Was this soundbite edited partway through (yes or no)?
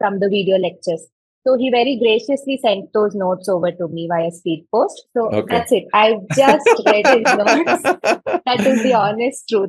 no